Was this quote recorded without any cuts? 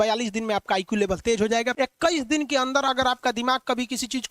no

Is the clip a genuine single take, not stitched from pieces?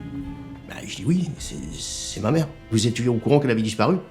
no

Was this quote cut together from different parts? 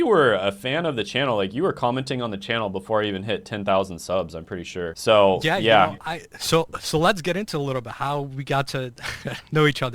yes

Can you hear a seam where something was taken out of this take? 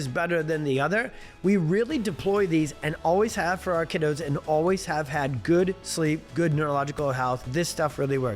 yes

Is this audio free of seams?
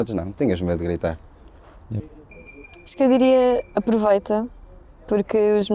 yes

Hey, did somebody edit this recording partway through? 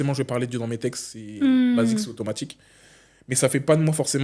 no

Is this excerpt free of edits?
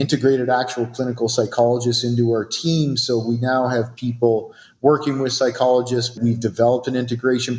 no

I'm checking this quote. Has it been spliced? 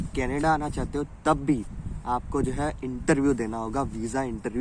no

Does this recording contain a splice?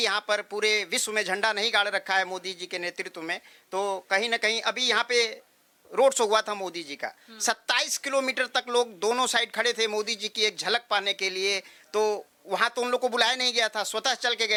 no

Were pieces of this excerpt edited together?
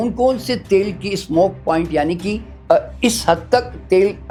no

